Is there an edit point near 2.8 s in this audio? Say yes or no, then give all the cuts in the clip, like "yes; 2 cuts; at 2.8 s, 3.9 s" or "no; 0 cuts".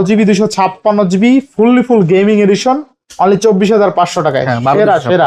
no; 0 cuts